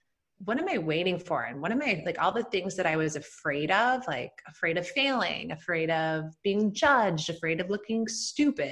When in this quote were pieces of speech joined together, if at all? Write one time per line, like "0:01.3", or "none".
none